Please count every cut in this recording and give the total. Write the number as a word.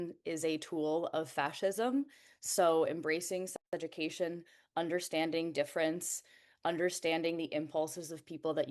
zero